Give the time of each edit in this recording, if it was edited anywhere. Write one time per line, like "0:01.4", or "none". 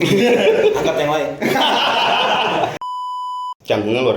0:03.0